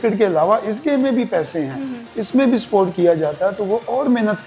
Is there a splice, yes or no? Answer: no